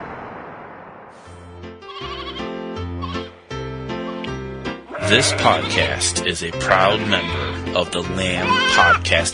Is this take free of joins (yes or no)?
no